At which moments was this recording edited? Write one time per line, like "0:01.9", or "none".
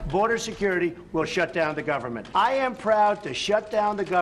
0:02.1

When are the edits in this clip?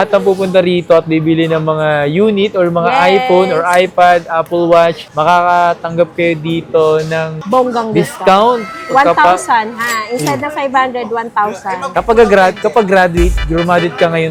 none

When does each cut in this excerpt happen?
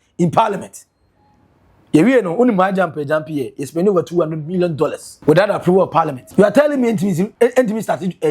0:05.1
0:06.2
0:07.3

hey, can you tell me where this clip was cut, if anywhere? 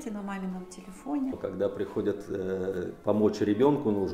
0:01.4

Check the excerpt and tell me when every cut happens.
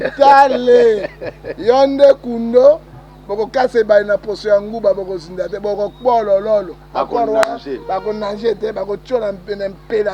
none

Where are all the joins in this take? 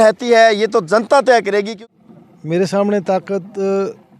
0:01.8

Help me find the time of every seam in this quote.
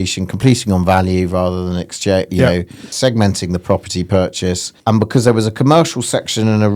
0:02.9
0:04.7

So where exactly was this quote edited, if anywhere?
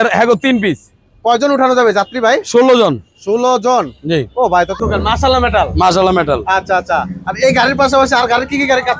0:04.7

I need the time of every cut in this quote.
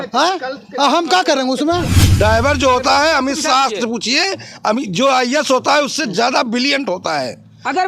0:02.0

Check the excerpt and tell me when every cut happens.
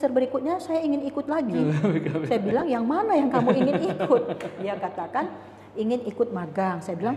none

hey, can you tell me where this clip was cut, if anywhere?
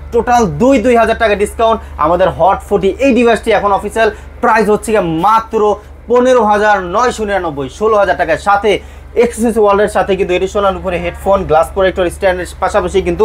none

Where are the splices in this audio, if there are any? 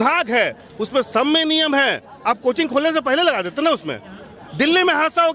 none

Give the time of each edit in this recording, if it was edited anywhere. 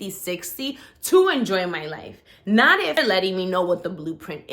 0:03.0

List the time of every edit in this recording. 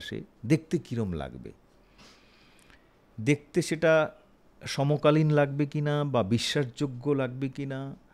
none

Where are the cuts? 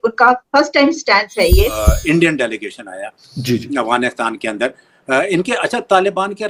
0:02.0

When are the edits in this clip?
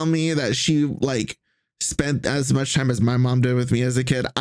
none

